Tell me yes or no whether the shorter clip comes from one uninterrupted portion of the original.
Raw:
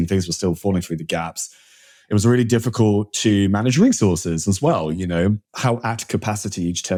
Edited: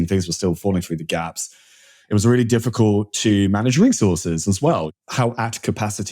no